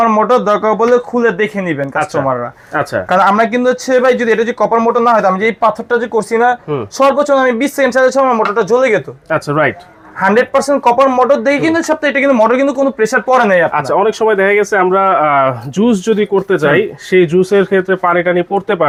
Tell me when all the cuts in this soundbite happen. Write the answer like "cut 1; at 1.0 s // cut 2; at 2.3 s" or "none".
none